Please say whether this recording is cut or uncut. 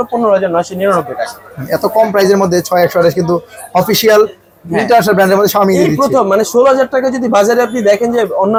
uncut